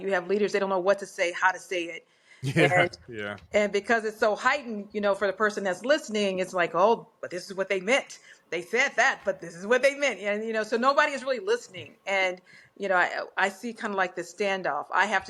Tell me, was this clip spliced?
no; 0 cuts

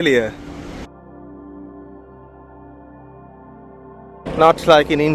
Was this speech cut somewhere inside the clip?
no; 0 cuts

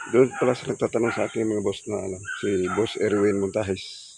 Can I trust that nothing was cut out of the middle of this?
yes; 0 cuts

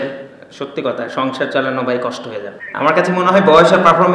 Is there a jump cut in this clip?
yes; 1 cut; at 2.6 s

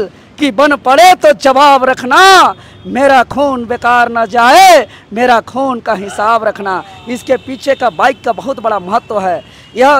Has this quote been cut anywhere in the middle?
no; 0 cuts

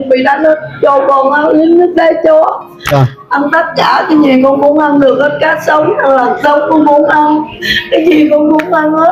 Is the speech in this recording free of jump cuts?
yes; 0 cuts

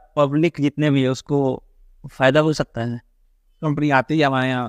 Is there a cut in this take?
yes; 1 cut; at 3.7 s

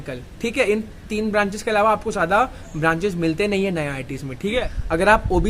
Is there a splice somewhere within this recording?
yes; 1 cut; at 4.6 s

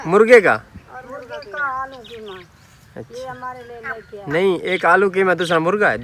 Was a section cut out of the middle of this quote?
no; 0 cuts

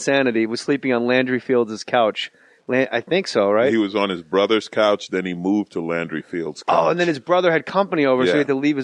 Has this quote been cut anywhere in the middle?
yes; 1 cut; at 7.0 s

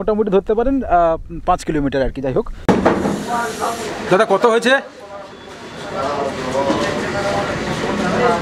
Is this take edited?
yes; 1 cut; at 2.6 s

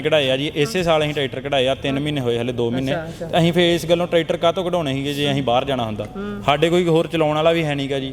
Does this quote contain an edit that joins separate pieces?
no; 0 cuts

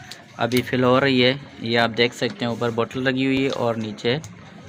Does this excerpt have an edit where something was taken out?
no; 0 cuts

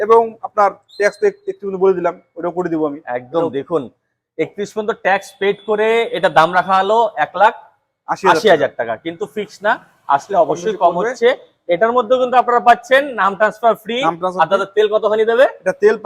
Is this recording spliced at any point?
no; 0 cuts

